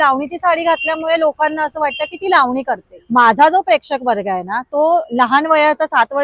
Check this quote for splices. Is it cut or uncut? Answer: cut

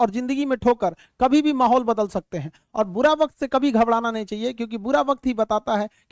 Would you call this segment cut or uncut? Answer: uncut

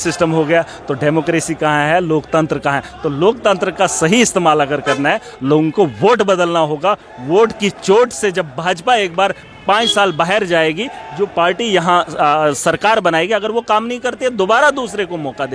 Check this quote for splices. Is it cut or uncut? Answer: uncut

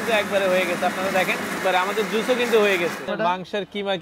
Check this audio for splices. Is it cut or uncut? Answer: cut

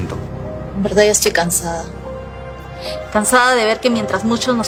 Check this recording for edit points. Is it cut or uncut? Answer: uncut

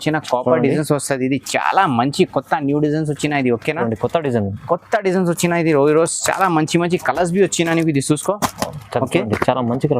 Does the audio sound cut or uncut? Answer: uncut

